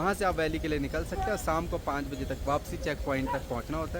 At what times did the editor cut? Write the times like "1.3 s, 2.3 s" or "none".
none